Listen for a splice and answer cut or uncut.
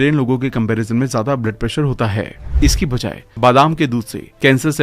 cut